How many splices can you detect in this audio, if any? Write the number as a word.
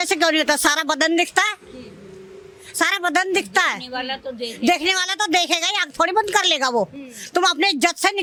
zero